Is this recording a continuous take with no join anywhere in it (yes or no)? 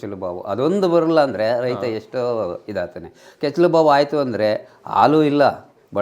yes